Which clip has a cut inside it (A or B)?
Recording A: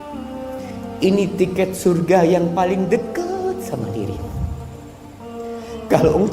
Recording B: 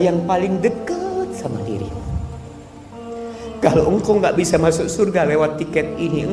A